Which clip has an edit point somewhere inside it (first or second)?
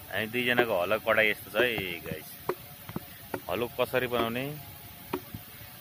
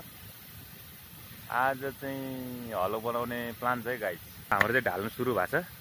second